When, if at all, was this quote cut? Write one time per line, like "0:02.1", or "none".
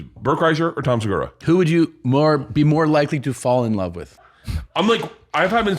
0:01.4
0:04.0